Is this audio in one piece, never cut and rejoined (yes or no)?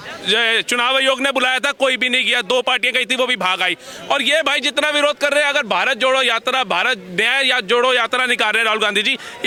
yes